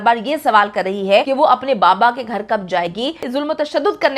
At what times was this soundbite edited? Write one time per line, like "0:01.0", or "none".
0:01.3
0:03.3